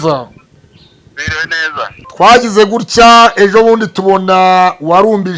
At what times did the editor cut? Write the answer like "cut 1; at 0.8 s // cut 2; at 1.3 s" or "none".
cut 1; at 2.0 s